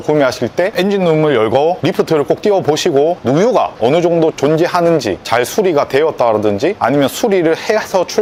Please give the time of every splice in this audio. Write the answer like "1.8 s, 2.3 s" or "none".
none